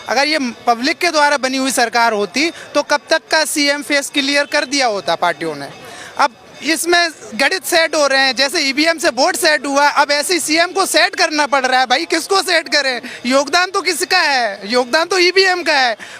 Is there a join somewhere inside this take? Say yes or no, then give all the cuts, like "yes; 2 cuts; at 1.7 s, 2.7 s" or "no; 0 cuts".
no; 0 cuts